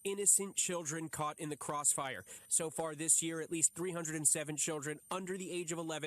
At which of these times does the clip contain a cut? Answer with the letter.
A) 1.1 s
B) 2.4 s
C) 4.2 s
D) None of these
B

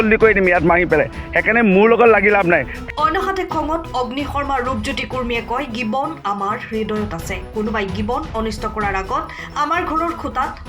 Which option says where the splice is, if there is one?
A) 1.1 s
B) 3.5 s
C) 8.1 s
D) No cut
A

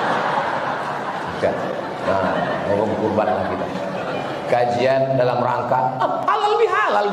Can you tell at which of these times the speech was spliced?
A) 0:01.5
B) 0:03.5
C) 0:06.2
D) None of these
D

